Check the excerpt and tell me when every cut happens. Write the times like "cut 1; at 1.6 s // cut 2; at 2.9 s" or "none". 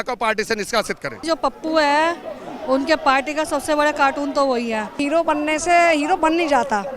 cut 1; at 1.2 s // cut 2; at 5.0 s